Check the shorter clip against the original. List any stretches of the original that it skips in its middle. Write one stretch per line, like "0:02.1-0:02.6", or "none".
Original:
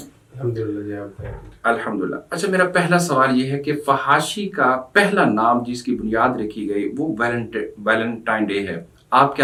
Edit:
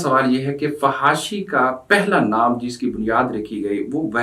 none